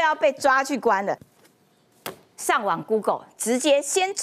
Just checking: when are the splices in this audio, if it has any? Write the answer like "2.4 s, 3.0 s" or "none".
1.3 s